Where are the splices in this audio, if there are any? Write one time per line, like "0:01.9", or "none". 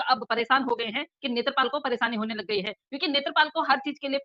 none